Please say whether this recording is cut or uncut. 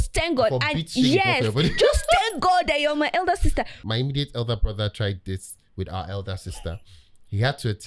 cut